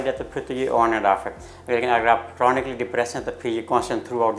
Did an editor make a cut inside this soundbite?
no; 0 cuts

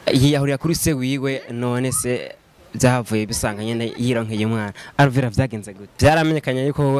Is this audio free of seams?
no; 1 cut; at 5.9 s

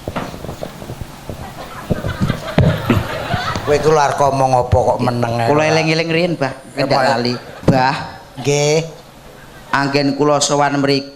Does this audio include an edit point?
yes; 1 cut; at 7.5 s

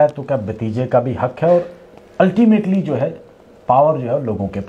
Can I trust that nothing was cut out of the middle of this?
yes; 0 cuts

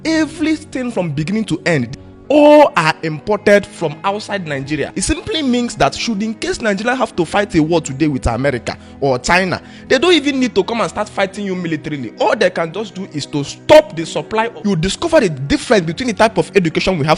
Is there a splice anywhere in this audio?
yes; 3 cuts; at 2.0 s, 4.9 s, 14.5 s

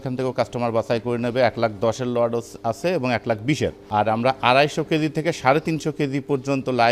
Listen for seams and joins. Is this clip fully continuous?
yes; 0 cuts

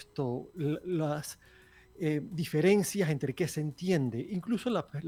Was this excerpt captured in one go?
yes; 0 cuts

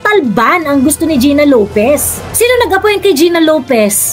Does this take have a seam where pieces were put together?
yes; 1 cut; at 2.3 s

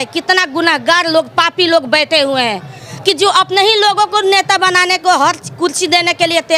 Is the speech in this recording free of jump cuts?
yes; 0 cuts

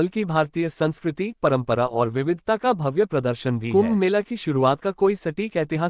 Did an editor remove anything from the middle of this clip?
yes; 1 cut; at 3.6 s

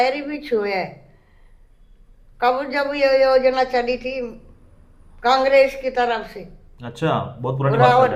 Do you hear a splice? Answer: no; 0 cuts

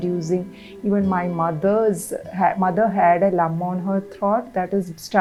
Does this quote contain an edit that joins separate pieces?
no; 0 cuts

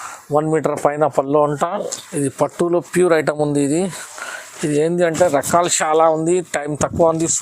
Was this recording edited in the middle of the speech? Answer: yes; 1 cut; at 2.0 s

